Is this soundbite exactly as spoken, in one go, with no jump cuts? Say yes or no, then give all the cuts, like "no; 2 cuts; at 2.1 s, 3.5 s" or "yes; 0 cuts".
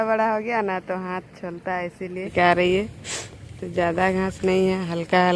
no; 1 cut; at 2.3 s